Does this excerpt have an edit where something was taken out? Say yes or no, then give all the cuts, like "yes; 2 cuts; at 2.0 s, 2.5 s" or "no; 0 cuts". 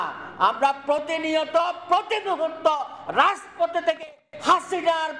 no; 0 cuts